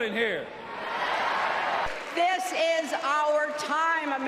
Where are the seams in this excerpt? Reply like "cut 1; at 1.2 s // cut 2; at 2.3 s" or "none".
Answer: cut 1; at 1.9 s